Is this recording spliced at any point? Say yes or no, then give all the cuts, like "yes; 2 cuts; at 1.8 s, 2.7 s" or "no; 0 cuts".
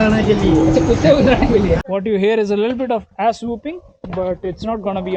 yes; 1 cut; at 1.8 s